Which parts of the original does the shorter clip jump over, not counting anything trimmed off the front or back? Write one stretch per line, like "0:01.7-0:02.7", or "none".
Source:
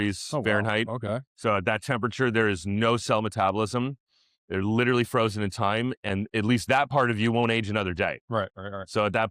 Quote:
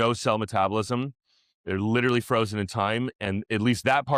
none